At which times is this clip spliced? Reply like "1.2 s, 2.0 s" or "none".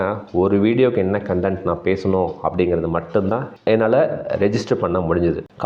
3.6 s